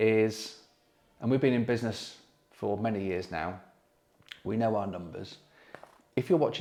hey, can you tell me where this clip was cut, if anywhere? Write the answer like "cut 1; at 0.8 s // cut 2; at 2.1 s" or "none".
none